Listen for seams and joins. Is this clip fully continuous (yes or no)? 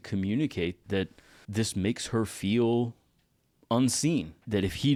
yes